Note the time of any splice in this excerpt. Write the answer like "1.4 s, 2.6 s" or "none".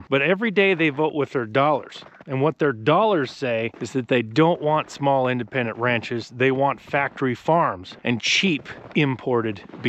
3.8 s, 7.9 s